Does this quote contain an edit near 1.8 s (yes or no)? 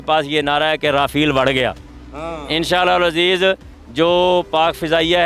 no